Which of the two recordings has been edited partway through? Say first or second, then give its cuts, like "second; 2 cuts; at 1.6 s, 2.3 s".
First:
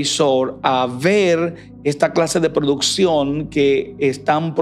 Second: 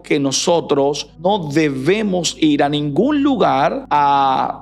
second; 2 cuts; at 1.1 s, 3.8 s